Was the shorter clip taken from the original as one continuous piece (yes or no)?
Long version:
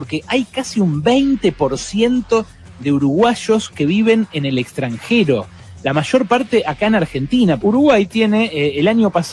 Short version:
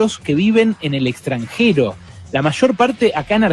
yes